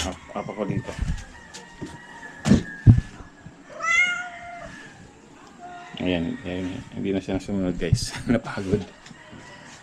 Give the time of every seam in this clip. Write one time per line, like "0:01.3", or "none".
none

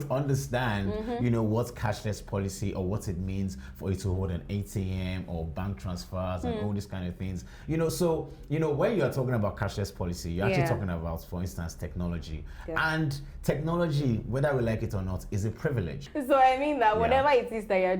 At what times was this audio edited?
0:16.0

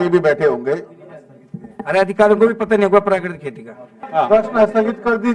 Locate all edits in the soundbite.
0:04.0

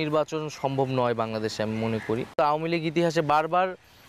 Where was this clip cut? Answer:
0:02.2

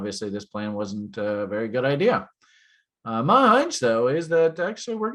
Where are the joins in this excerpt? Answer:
none

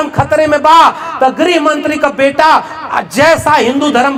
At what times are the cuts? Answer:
none

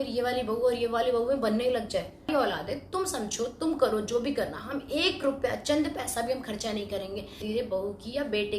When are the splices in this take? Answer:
0:02.3
0:07.4

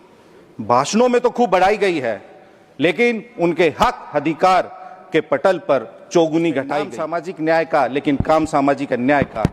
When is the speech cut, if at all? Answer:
0:07.0

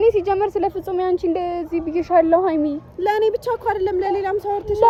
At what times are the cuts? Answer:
none

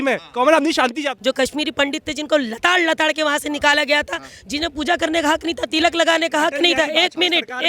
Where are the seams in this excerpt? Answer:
0:01.1

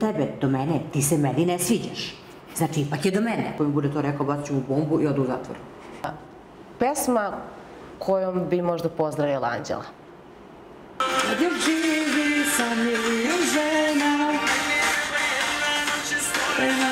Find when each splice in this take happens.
0:03.6
0:06.0
0:11.0

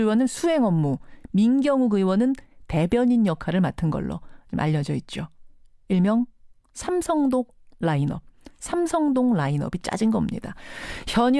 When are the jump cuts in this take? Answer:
0:06.0

